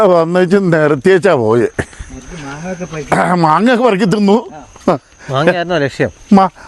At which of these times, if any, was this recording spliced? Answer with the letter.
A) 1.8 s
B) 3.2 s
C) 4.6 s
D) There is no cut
D